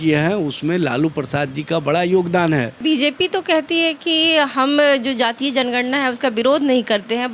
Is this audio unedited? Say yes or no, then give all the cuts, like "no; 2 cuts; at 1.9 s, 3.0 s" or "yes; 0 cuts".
no; 1 cut; at 2.7 s